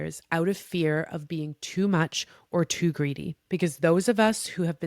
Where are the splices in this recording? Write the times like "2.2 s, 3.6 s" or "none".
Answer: 3.3 s